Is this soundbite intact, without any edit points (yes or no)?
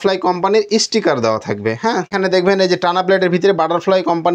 no